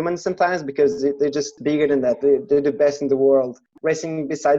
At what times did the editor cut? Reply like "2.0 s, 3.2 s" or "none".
3.7 s